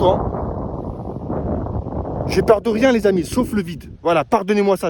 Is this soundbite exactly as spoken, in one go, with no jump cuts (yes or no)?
yes